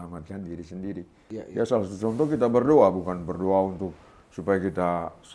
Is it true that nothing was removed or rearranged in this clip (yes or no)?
no